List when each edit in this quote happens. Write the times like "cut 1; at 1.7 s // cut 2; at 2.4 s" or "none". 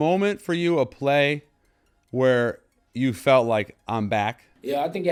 none